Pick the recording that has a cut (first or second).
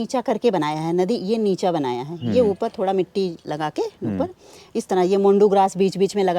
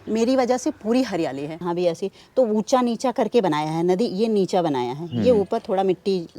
second